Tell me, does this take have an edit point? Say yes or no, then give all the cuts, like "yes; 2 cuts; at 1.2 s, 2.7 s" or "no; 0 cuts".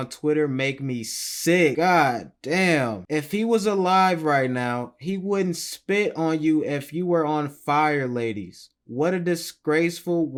no; 0 cuts